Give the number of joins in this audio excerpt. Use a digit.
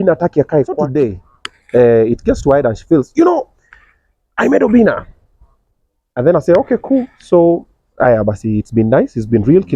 1